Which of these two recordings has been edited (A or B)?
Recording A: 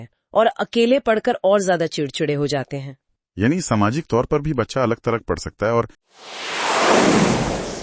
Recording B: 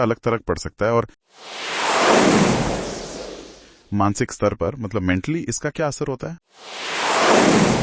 B